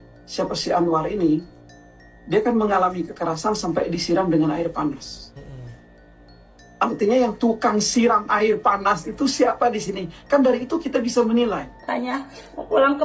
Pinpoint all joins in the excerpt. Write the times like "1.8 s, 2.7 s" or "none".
11.7 s